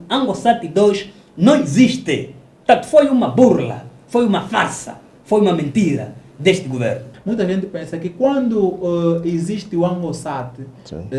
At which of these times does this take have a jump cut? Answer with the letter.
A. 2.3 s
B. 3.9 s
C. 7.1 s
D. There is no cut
C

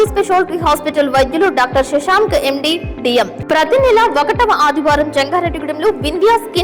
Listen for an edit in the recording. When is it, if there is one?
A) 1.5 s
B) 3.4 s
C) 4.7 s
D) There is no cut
B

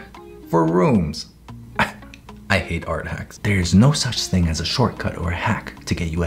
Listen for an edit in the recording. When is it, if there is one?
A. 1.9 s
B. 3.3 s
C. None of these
B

